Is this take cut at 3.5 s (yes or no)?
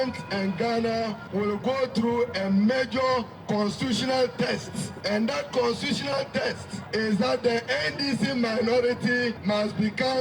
no